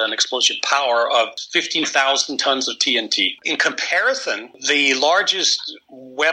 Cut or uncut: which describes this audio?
cut